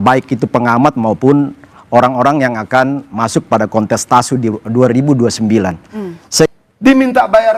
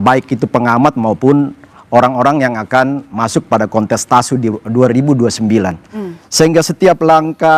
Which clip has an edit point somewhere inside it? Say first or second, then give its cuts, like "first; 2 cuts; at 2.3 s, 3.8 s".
first; 1 cut; at 6.5 s